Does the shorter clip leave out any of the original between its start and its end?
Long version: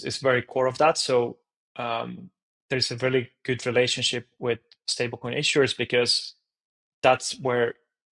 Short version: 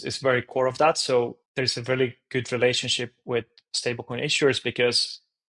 yes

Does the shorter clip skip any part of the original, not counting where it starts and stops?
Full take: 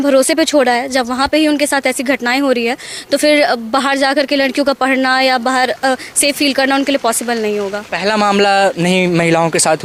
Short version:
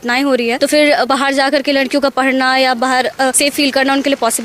yes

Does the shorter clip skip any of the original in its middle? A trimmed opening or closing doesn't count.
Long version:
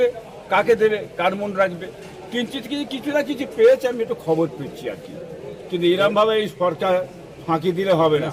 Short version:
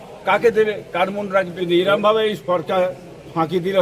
yes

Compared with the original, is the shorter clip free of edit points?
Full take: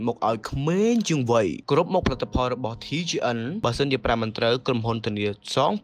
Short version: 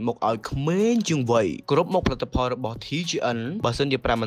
yes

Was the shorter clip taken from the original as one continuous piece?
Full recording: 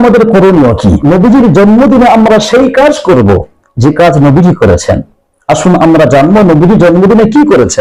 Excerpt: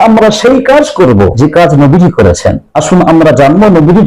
no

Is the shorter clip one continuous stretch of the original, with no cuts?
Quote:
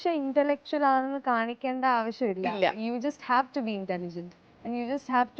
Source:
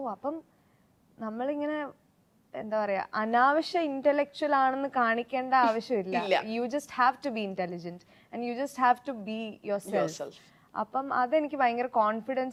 yes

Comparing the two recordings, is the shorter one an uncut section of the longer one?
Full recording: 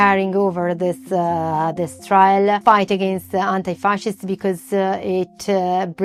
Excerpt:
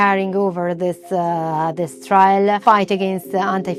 yes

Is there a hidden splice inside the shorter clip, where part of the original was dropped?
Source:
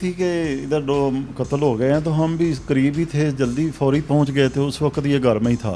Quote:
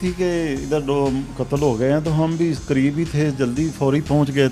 no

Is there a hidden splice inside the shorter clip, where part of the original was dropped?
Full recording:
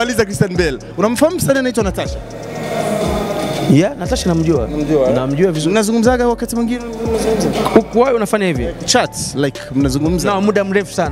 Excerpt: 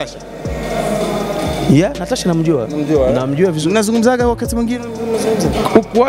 no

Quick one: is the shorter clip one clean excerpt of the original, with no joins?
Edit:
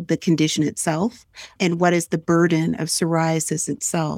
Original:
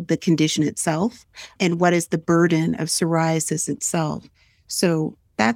yes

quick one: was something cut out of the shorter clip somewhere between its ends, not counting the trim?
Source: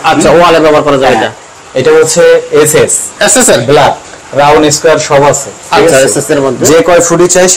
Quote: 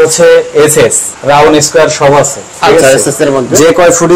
yes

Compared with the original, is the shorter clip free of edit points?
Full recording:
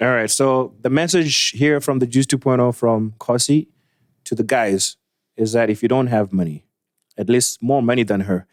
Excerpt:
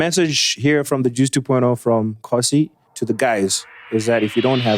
no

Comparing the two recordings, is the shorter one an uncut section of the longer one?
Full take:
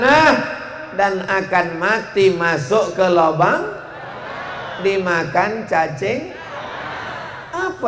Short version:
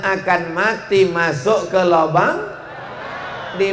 yes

